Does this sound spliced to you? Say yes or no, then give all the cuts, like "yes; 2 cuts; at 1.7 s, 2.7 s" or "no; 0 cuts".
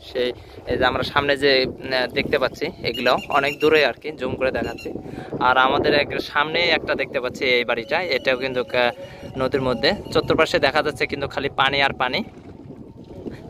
no; 0 cuts